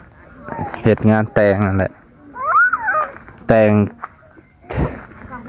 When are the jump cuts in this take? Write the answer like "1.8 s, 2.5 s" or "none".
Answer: none